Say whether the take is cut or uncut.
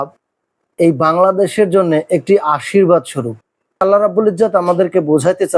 cut